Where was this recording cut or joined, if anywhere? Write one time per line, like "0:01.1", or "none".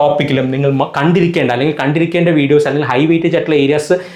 none